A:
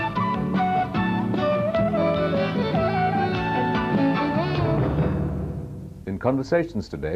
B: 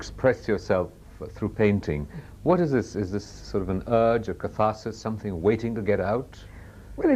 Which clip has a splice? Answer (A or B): A